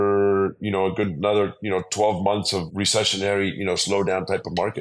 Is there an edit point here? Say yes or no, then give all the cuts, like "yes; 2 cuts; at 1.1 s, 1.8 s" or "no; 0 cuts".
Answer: yes; 1 cut; at 2.6 s